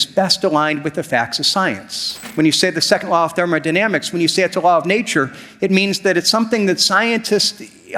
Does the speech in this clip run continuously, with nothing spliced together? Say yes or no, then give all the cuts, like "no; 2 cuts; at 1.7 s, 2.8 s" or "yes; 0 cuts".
no; 1 cut; at 2.2 s